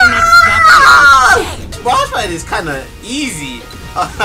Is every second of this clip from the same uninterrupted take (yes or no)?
no